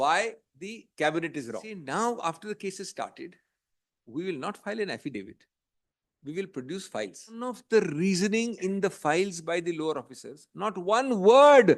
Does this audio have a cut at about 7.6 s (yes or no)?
yes